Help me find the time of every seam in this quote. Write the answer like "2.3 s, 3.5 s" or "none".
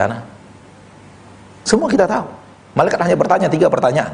none